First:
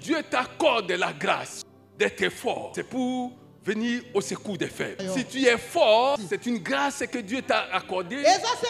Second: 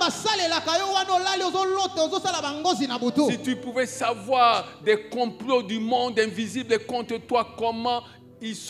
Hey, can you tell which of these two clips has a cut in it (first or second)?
first